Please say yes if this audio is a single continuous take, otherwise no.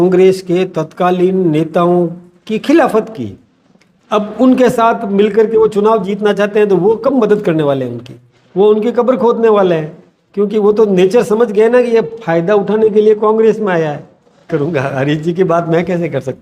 no